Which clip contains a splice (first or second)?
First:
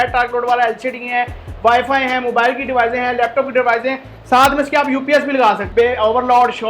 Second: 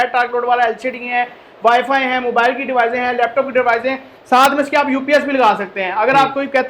first